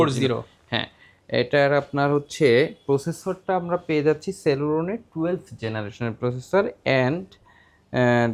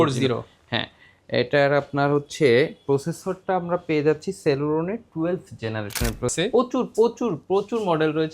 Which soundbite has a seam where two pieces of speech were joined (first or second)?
second